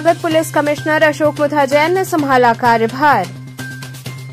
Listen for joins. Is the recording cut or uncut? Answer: uncut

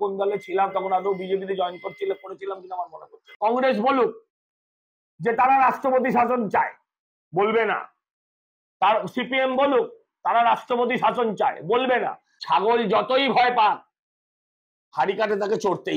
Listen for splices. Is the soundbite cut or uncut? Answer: cut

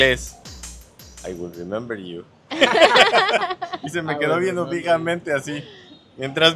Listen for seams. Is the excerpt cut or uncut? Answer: uncut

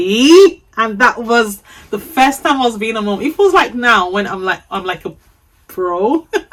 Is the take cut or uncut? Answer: uncut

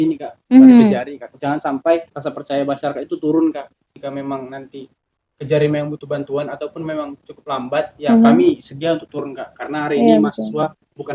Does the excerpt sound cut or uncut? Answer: cut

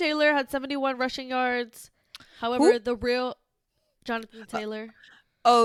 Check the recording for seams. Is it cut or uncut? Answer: uncut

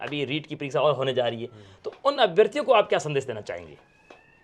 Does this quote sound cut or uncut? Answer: uncut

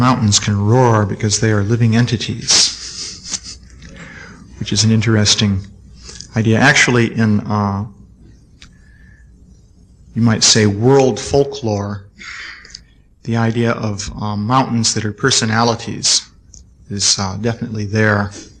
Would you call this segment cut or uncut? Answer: cut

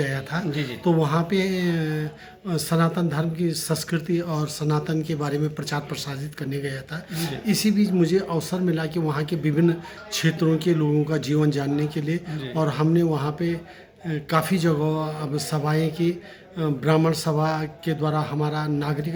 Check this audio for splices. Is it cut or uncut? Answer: uncut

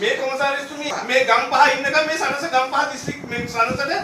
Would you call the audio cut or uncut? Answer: cut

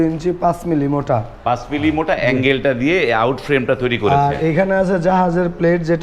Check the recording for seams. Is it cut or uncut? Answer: uncut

